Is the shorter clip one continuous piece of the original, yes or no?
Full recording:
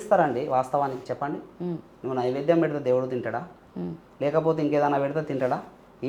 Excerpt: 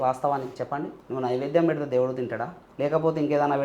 no